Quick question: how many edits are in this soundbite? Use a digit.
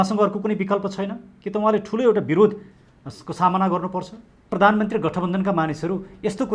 1